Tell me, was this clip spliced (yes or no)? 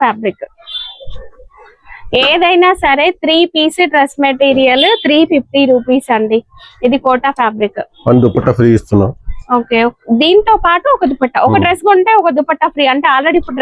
no